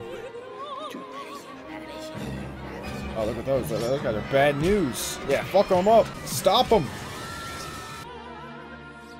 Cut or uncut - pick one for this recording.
cut